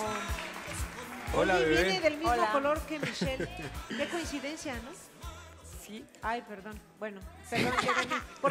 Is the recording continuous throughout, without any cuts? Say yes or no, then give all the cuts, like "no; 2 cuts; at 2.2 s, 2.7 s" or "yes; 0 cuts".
yes; 0 cuts